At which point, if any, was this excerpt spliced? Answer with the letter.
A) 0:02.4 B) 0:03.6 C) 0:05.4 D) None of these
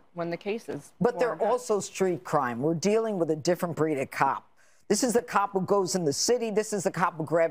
D